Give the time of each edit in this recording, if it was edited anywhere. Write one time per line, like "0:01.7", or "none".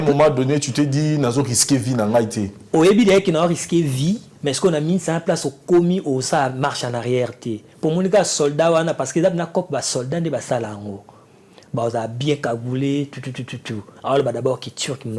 none